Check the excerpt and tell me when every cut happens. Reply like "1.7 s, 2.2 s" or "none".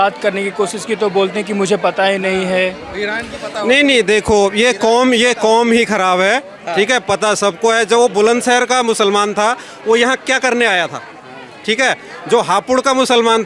none

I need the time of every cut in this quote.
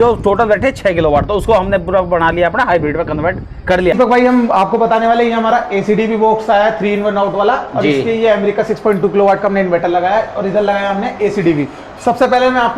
3.9 s

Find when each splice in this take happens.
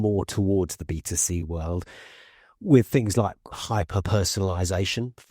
3.5 s

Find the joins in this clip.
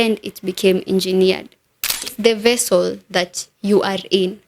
2.1 s

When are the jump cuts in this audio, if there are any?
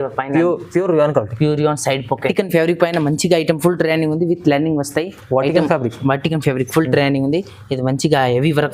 2.3 s

